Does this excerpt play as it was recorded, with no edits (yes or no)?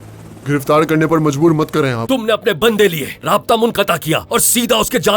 no